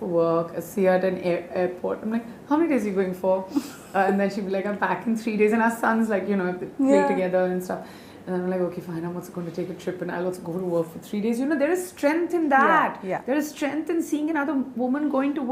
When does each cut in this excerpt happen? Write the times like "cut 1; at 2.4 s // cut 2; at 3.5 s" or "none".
none